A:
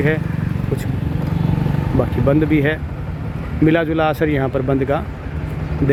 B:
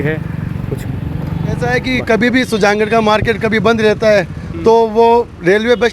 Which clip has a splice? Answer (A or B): B